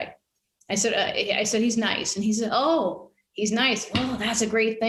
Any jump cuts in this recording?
no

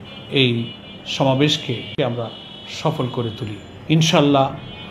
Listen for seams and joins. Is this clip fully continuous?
no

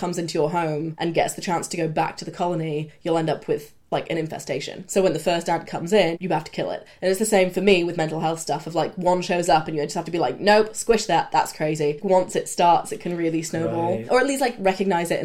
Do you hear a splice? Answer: yes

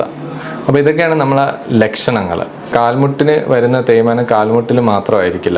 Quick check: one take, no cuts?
no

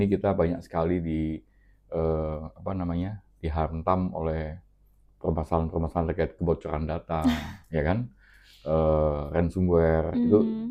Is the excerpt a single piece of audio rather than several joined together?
yes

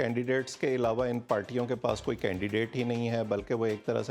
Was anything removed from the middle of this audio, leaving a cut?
no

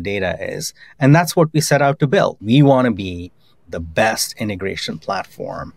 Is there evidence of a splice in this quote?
yes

